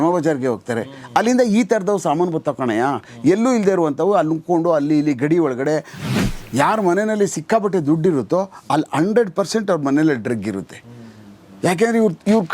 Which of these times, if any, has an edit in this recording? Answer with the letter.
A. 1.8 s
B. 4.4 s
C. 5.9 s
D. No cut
C